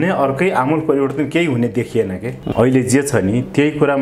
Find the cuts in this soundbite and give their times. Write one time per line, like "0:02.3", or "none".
0:02.4